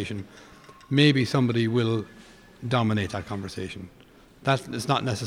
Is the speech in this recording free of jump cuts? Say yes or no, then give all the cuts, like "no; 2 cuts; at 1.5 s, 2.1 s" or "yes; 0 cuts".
yes; 0 cuts